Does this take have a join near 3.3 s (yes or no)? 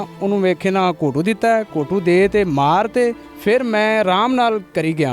yes